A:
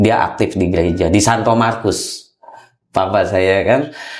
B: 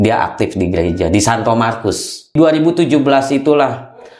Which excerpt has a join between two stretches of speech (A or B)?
B